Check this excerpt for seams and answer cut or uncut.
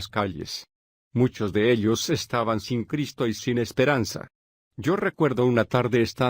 cut